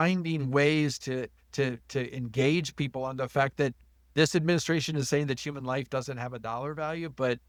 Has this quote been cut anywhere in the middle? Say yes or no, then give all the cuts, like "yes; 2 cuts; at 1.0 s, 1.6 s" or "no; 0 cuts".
no; 0 cuts